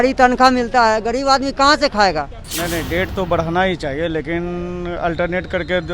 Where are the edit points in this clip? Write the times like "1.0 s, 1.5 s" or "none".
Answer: 2.4 s